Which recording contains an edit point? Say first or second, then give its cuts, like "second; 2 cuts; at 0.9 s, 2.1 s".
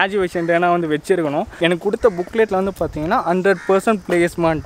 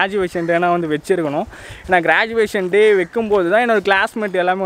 first; 1 cut; at 1.5 s